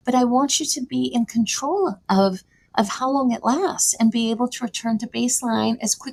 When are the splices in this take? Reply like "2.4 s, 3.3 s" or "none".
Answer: none